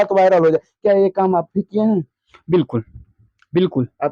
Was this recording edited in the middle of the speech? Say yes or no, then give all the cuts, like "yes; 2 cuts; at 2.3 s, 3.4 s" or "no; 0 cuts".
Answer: no; 0 cuts